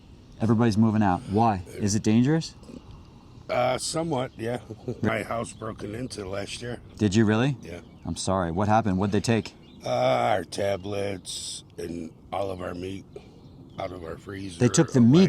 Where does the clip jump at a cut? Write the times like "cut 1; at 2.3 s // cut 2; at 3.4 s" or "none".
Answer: cut 1; at 5.1 s